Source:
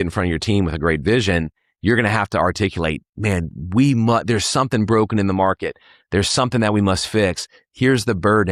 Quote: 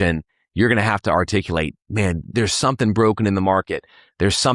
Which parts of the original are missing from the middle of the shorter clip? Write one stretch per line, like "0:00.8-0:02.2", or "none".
0:03.6-0:04.2